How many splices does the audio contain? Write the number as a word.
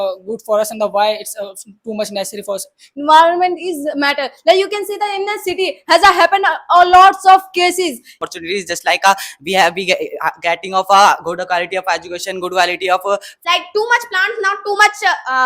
three